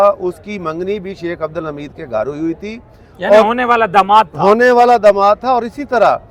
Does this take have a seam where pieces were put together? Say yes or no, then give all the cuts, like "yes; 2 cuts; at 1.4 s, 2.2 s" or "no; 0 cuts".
no; 0 cuts